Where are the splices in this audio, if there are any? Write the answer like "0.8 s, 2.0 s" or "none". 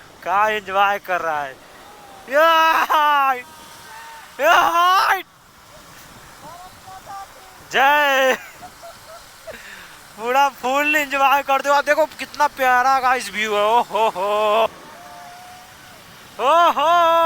14.7 s